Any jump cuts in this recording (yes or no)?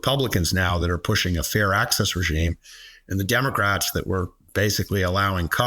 no